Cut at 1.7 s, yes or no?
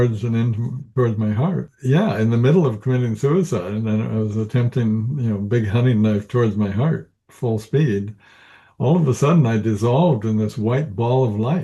yes